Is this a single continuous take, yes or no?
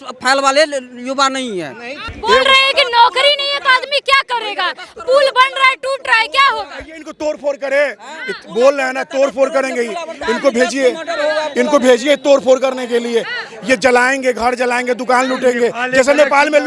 no